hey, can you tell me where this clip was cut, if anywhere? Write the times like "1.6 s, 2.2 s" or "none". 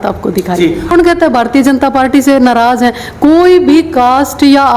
0.9 s